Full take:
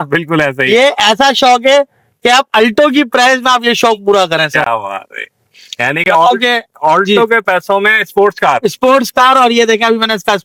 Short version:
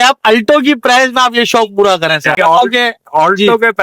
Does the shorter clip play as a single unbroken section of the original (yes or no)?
no